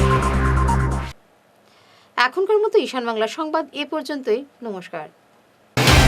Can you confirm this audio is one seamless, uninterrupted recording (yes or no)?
yes